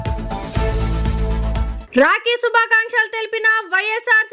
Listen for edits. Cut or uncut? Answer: cut